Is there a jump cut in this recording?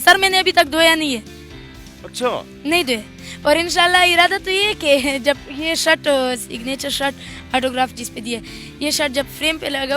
no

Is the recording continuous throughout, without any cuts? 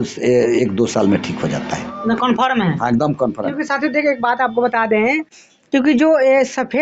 yes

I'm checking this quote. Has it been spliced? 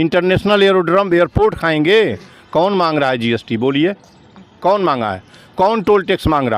no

